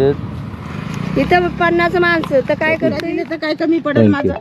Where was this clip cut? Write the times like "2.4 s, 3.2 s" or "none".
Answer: 3.0 s